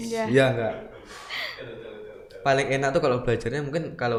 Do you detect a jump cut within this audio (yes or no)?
no